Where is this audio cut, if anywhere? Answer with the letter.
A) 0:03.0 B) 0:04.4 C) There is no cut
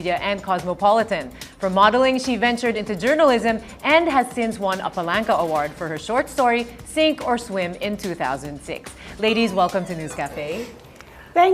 A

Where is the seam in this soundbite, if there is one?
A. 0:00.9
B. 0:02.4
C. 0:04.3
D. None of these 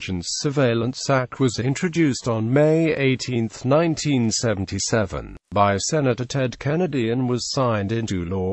A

